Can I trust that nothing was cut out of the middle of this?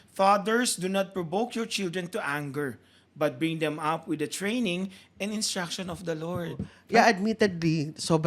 no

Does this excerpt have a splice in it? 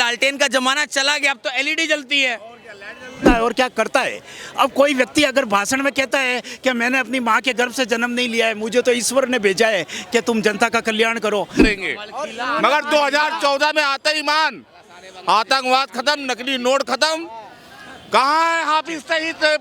yes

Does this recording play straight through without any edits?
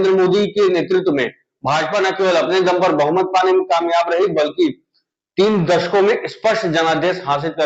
yes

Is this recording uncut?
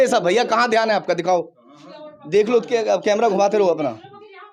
yes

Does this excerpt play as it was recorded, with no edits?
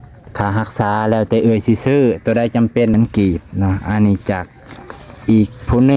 no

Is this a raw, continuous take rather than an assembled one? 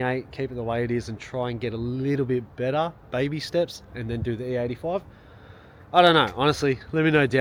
yes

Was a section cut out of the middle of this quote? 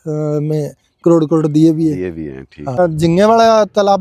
yes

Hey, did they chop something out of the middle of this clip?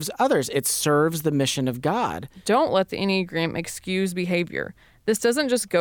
yes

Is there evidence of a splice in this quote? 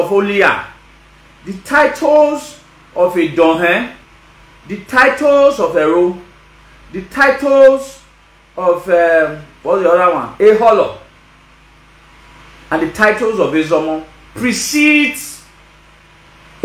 no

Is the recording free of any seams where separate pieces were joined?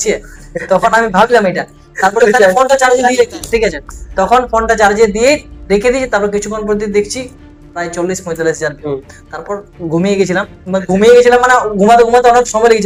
yes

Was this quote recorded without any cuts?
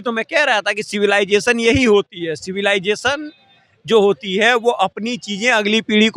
yes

